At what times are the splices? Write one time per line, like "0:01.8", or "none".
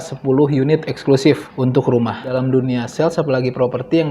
0:01.5
0:02.3